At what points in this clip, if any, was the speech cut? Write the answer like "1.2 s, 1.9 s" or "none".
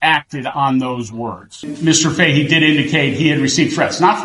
1.7 s